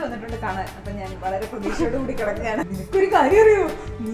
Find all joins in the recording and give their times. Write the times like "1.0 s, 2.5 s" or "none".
2.7 s